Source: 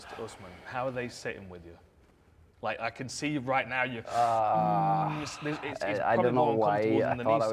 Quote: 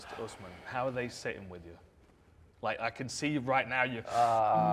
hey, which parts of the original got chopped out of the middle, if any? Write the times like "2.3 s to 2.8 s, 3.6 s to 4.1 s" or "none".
none